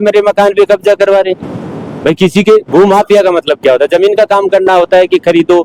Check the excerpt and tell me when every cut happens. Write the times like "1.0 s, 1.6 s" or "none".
none